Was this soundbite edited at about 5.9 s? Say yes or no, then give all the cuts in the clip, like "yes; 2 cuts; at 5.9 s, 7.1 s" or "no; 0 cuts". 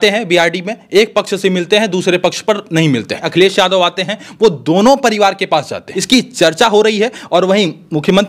yes; 2 cuts; at 3.2 s, 5.9 s